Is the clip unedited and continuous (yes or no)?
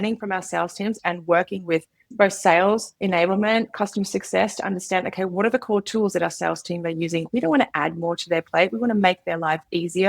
no